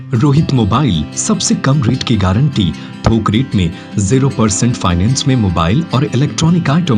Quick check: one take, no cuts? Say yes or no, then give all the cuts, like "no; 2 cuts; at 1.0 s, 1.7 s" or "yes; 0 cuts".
yes; 0 cuts